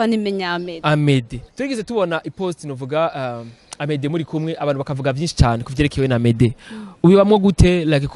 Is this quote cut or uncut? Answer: cut